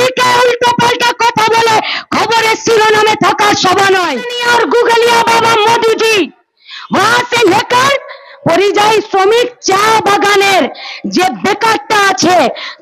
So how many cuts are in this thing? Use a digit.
1